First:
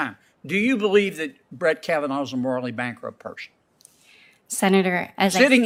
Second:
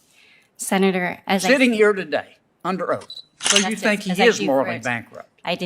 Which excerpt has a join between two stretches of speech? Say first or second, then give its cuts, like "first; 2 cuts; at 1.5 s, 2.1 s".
second; 1 cut; at 3.5 s